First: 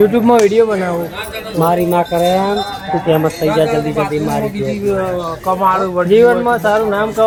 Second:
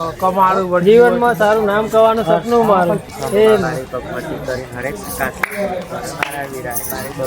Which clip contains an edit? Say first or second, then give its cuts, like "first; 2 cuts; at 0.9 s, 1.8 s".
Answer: second; 1 cut; at 3.1 s